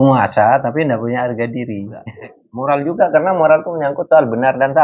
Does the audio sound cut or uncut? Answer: cut